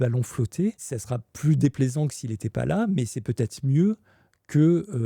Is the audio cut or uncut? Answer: cut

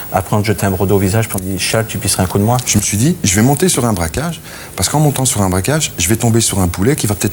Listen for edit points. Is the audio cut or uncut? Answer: cut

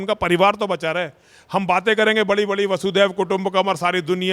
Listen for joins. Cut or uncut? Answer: uncut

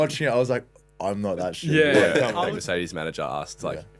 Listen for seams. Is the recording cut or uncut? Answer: cut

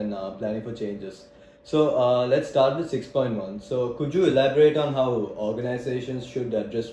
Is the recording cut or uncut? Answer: uncut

